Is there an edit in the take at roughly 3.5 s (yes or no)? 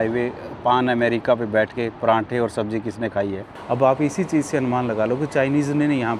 yes